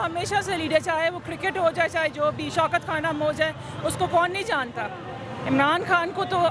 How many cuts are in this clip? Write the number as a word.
zero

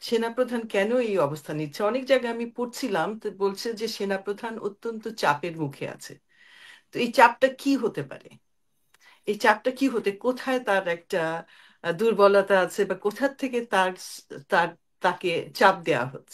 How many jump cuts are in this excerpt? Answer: zero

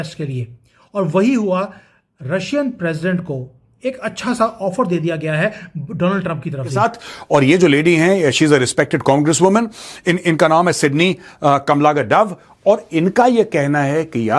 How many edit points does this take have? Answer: one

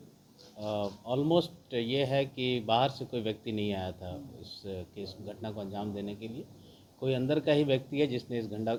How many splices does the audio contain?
zero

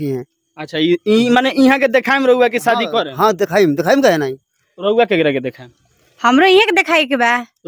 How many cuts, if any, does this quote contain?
zero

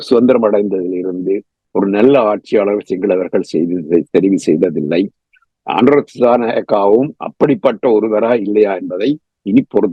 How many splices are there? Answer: one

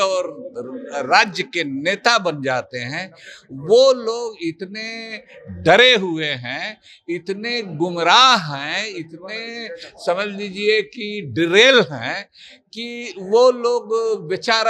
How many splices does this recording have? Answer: zero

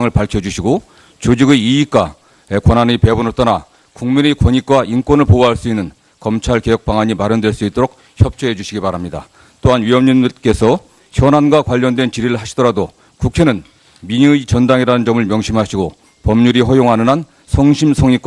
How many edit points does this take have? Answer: one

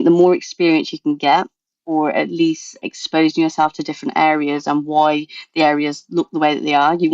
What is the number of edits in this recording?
one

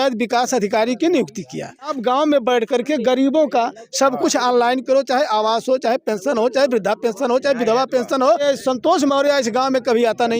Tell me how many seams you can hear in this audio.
two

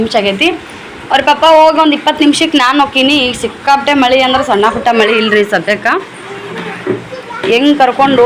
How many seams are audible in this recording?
zero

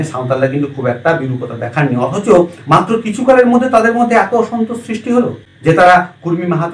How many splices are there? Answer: one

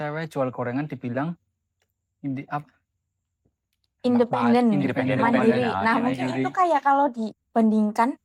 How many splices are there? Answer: zero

